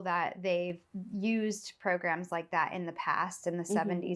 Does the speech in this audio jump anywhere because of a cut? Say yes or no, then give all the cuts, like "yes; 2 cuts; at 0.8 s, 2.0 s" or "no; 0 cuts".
no; 0 cuts